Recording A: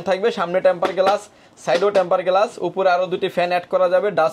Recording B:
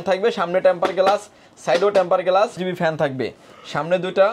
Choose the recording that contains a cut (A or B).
B